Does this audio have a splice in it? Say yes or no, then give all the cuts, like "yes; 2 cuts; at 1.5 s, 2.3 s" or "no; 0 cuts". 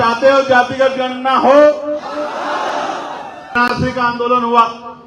yes; 1 cut; at 3.5 s